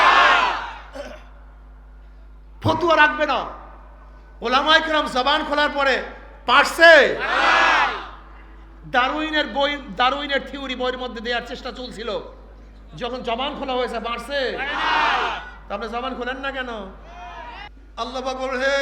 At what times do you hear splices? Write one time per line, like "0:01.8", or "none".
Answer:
0:17.7